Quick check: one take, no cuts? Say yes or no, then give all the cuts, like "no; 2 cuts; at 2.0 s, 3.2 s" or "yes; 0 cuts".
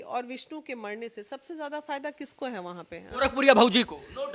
yes; 0 cuts